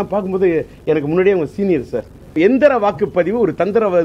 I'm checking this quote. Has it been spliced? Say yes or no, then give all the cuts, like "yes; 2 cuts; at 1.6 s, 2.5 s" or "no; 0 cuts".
yes; 1 cut; at 2.3 s